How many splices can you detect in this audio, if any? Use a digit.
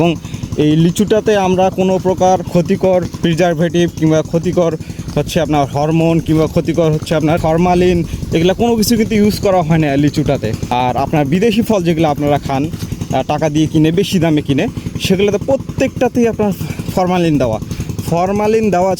3